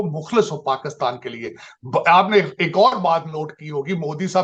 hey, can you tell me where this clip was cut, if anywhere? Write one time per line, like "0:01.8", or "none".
none